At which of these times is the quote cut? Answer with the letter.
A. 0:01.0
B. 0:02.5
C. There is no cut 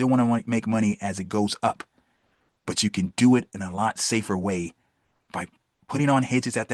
C